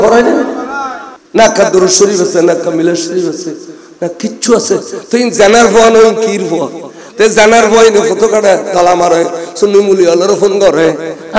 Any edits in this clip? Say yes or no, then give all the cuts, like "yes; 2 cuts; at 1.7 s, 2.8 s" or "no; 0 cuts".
no; 0 cuts